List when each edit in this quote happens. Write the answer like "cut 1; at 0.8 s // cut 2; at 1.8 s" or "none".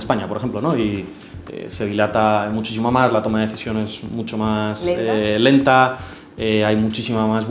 none